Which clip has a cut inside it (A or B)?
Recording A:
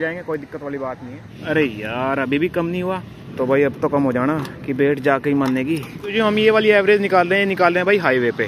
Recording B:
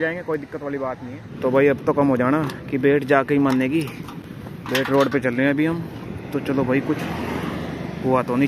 A